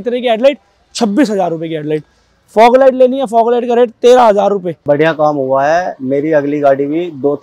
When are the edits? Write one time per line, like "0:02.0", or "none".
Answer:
0:04.7